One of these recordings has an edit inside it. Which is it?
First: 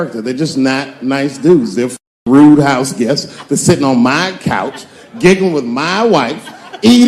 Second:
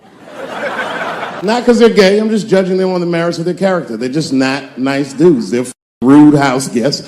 second; 1 cut; at 1.4 s

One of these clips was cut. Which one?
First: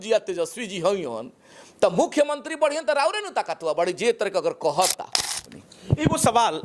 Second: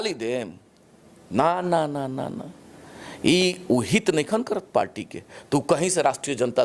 first; 1 cut; at 5.4 s

